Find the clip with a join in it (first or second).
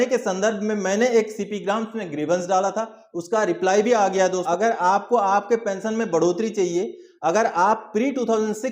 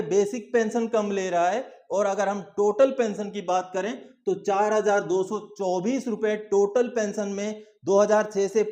first